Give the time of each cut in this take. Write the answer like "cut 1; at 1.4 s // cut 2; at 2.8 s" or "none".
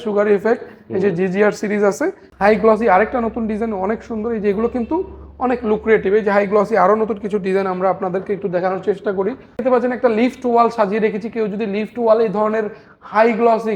cut 1; at 2.2 s // cut 2; at 9.6 s